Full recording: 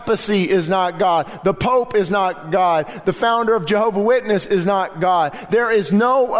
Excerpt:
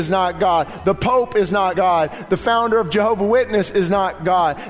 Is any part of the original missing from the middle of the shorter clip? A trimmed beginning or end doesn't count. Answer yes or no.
yes